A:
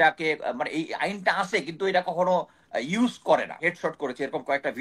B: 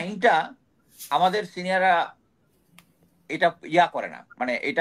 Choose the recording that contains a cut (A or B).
A